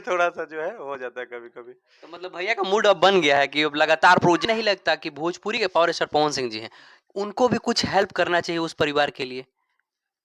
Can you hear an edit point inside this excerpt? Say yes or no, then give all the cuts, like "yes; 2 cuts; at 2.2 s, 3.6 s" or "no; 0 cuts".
yes; 1 cut; at 4.4 s